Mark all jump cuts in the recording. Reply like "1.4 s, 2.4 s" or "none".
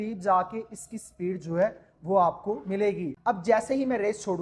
3.0 s